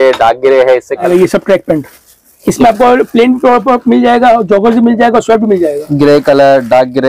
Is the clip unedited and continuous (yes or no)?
no